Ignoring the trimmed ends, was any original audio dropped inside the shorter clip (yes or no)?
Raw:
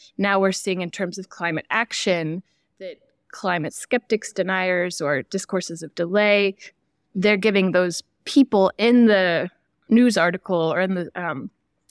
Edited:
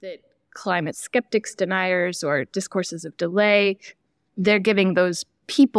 no